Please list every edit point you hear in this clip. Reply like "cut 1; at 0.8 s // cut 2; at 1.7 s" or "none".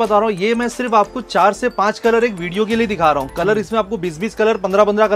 none